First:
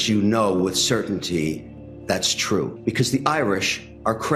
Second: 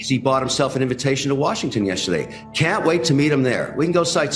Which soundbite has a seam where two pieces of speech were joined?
first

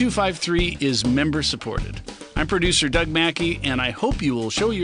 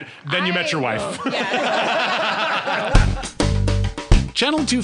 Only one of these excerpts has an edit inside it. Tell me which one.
second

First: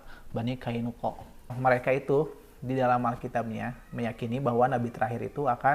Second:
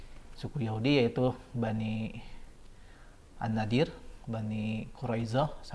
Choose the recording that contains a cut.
first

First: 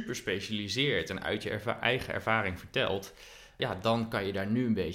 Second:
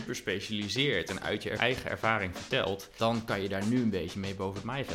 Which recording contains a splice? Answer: second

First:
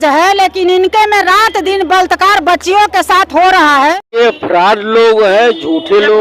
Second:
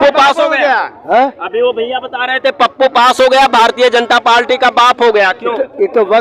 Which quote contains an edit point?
first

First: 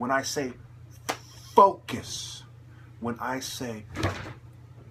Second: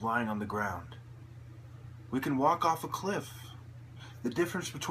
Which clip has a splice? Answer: second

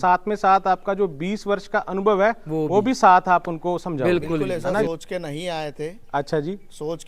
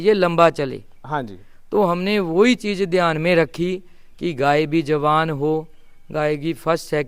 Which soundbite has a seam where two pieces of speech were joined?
first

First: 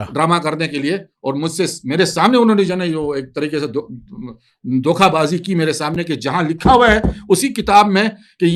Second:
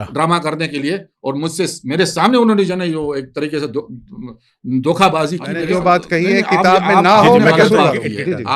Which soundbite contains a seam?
second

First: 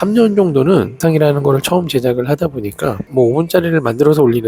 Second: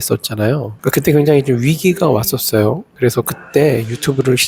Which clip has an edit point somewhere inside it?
first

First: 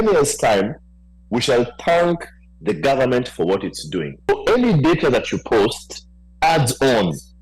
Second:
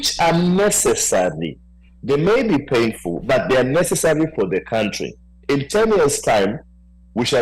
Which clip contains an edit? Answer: first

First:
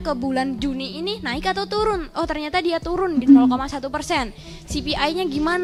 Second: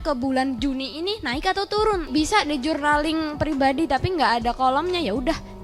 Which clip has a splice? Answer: second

